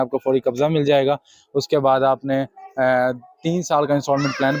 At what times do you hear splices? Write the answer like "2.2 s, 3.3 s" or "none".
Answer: none